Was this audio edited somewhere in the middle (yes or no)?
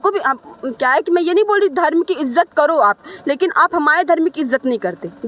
no